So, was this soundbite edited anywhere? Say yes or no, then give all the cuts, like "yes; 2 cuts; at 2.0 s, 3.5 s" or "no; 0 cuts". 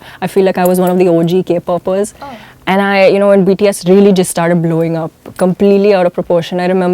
no; 0 cuts